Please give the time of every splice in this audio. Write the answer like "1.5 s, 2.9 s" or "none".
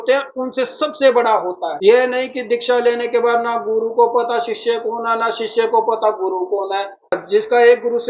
1.7 s, 7.1 s